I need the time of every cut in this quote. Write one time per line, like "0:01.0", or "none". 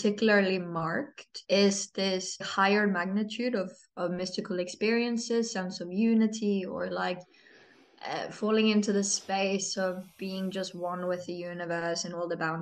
0:01.3
0:02.5